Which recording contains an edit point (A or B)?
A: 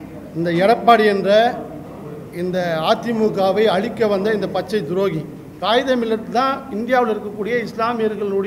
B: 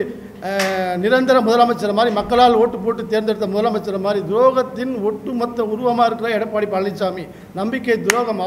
A